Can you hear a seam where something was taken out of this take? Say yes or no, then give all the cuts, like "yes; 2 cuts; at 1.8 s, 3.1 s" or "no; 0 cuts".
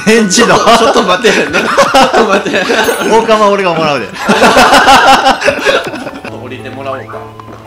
yes; 1 cut; at 6.2 s